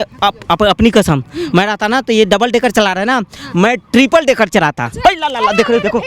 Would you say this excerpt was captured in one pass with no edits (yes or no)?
no